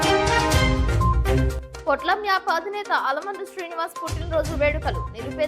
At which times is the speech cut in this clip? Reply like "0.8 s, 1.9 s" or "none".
none